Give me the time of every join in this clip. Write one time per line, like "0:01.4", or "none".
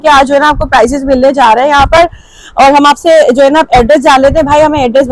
none